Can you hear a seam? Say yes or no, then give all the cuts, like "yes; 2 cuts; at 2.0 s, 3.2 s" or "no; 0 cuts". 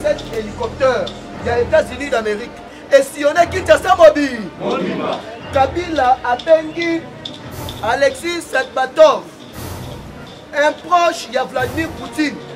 no; 0 cuts